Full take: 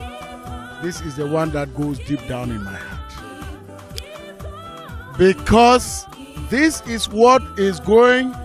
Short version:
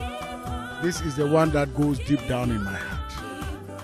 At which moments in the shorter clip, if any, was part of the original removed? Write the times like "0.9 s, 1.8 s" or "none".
none